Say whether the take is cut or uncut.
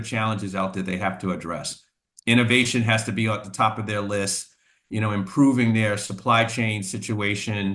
uncut